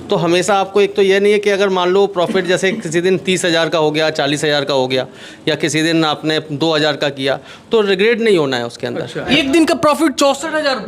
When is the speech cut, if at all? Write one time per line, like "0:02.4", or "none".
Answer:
0:09.2